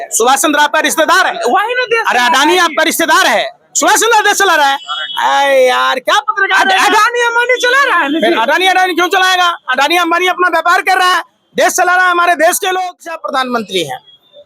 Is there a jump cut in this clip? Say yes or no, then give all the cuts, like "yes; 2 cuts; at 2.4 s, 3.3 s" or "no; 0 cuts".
yes; 1 cut; at 13.2 s